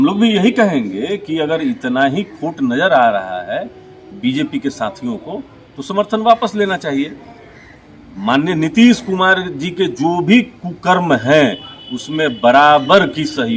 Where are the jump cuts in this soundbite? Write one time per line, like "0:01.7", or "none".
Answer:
none